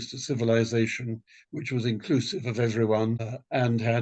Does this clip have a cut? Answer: no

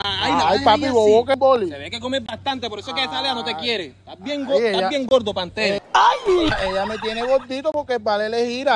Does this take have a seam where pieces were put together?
yes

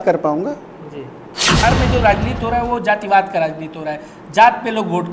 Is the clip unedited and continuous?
no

